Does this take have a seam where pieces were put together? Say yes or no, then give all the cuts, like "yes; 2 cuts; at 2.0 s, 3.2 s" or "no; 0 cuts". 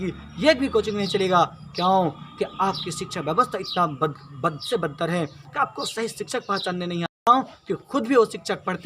yes; 1 cut; at 7.1 s